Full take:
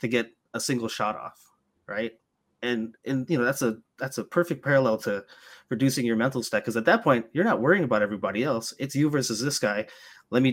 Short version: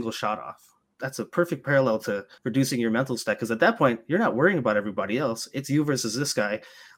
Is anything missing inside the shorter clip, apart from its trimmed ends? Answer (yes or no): yes